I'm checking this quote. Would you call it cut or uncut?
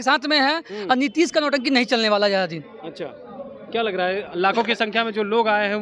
uncut